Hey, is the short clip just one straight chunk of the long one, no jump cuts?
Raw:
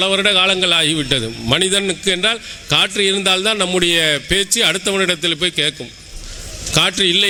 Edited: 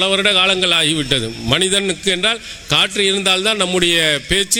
yes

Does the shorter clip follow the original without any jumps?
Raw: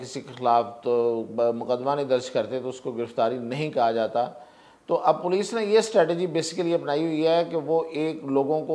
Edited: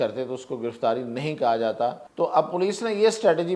no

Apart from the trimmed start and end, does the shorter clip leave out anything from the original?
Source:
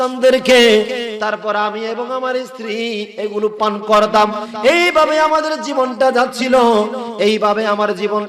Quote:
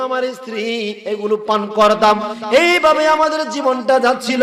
no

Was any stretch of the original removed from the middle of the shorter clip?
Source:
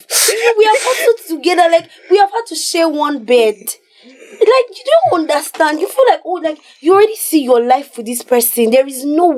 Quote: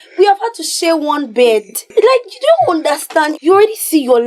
yes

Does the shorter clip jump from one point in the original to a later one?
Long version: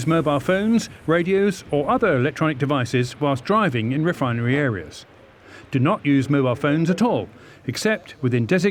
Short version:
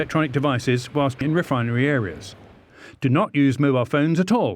yes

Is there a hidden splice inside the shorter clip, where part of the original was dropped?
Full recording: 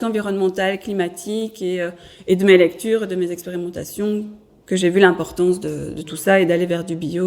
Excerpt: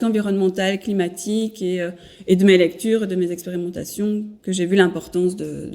yes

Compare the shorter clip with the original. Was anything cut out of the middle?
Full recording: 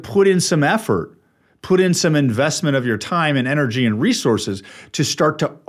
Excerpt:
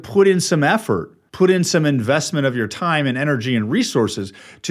yes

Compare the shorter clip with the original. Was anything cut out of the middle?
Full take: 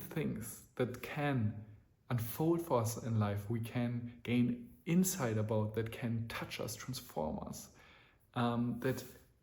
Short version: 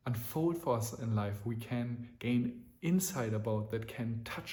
no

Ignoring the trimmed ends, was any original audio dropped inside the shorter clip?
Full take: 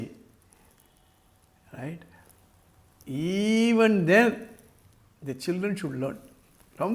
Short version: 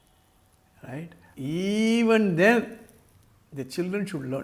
yes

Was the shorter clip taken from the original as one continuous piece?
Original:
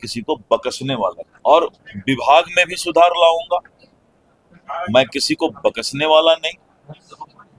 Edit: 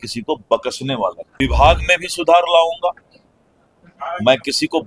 no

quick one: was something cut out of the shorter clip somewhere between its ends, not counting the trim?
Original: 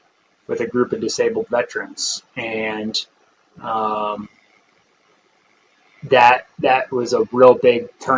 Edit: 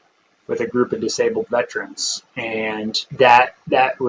yes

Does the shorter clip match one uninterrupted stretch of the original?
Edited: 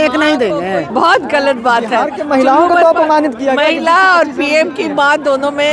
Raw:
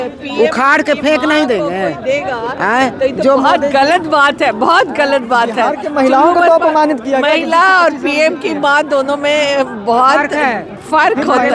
no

